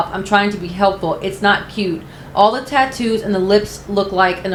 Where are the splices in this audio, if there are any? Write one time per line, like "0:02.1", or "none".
none